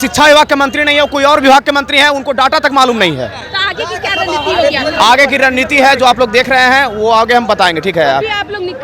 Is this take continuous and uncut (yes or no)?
yes